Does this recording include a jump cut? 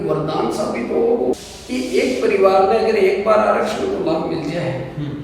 yes; 1 cut; at 1.4 s

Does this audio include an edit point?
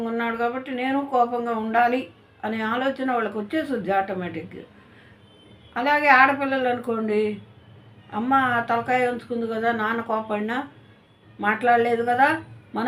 no; 0 cuts

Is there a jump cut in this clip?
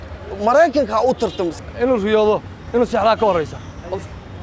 yes; 1 cut; at 1.5 s

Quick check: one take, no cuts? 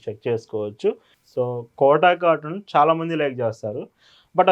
no; 1 cut; at 1.1 s

